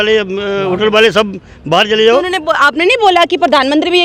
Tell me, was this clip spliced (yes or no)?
no